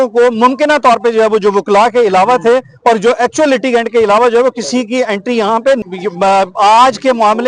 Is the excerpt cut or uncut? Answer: cut